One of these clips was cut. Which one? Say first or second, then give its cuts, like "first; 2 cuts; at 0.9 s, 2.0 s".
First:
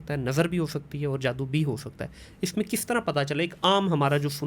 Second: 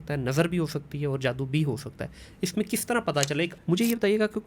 second; 1 cut; at 3.5 s